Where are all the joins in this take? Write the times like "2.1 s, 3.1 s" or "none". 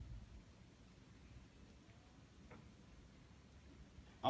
none

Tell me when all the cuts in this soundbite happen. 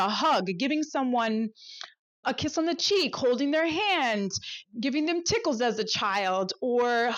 2.2 s, 4.6 s

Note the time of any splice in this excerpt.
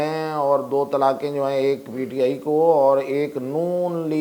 none

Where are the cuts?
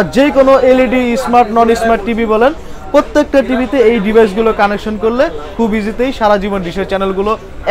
none

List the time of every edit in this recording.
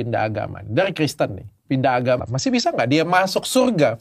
2.2 s

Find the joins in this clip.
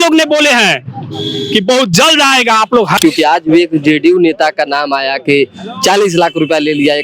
3.0 s

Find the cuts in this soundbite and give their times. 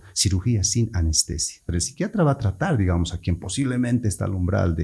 1.7 s

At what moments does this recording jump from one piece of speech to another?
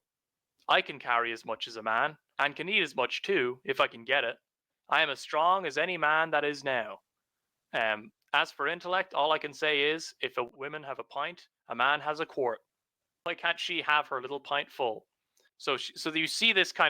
10.5 s, 13.2 s, 15.5 s

